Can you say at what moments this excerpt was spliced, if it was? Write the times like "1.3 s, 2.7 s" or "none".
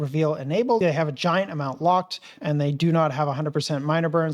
0.8 s, 2.4 s

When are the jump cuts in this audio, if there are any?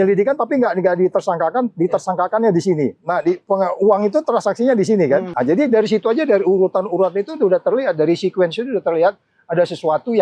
5.3 s

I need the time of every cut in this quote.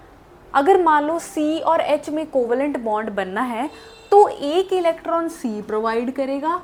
none

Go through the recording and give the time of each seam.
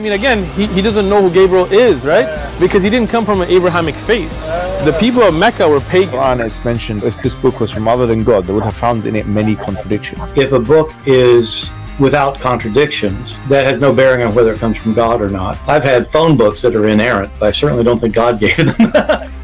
7.1 s

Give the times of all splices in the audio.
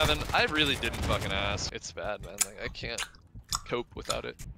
1.7 s

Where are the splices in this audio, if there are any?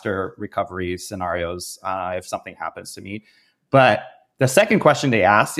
none

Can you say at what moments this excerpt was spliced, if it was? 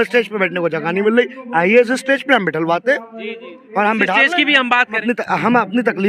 5.0 s

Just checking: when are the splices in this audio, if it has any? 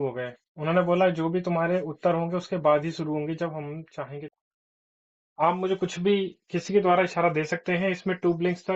4.2 s

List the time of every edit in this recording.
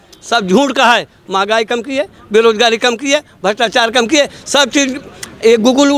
none

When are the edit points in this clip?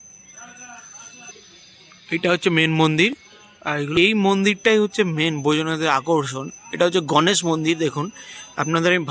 1.3 s, 3.9 s

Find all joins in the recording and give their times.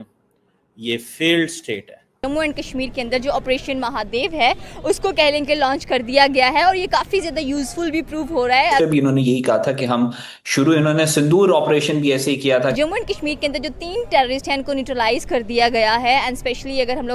2.2 s, 8.8 s, 12.8 s

